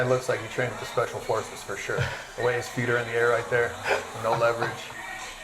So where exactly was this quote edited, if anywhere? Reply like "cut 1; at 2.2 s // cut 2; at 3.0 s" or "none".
none